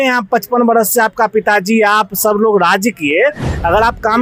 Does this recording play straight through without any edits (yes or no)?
yes